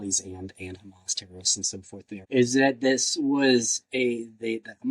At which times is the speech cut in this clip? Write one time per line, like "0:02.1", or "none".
0:02.2